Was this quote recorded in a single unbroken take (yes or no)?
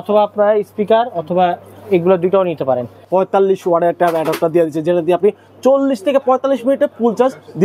no